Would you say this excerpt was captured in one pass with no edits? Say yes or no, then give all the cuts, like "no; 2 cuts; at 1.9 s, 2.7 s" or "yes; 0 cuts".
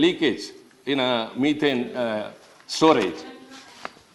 yes; 0 cuts